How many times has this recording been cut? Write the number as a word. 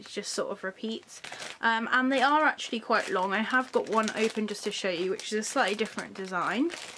zero